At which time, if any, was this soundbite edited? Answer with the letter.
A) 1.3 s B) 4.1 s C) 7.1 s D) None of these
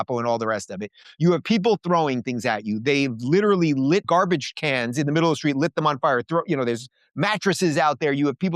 B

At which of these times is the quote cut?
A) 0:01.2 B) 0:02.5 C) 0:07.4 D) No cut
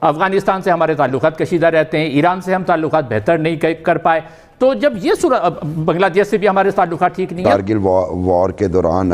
C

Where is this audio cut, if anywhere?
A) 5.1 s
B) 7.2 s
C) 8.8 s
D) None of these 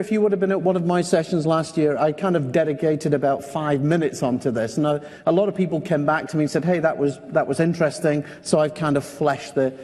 B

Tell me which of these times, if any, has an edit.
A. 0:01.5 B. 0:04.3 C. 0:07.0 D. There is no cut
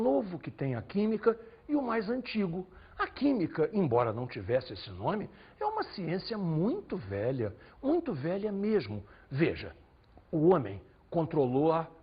C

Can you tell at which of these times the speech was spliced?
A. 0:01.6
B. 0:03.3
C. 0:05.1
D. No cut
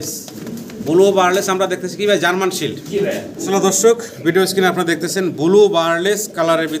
B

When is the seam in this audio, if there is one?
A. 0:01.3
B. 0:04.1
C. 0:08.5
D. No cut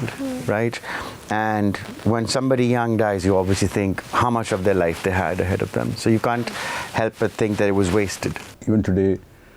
C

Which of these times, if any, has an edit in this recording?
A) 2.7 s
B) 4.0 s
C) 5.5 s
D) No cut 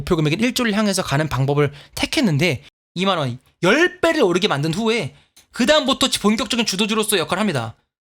A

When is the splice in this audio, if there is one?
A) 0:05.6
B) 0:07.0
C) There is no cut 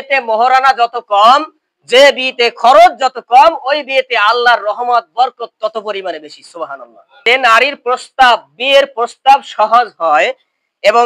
B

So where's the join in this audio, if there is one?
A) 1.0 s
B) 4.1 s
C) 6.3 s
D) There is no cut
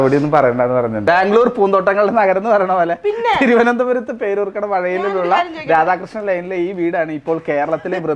A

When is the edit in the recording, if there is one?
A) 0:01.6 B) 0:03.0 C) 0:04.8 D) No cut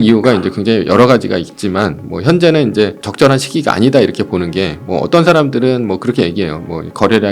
B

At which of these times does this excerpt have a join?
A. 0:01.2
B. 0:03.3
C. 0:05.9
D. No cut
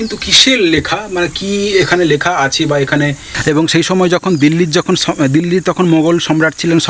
B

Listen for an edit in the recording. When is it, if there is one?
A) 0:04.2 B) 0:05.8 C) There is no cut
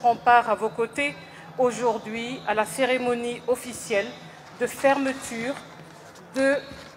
C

